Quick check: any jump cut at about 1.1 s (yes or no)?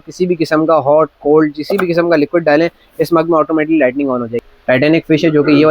no